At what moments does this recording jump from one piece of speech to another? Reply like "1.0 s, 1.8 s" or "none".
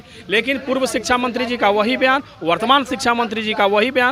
none